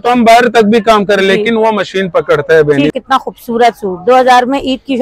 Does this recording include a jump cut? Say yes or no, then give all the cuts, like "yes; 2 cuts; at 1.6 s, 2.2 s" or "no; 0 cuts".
yes; 1 cut; at 2.9 s